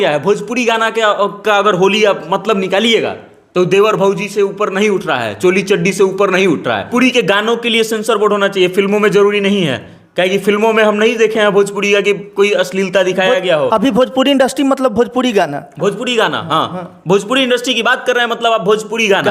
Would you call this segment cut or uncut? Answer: cut